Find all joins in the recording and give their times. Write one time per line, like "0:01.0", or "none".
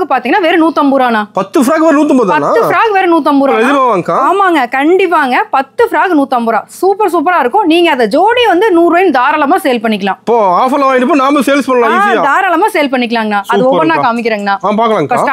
none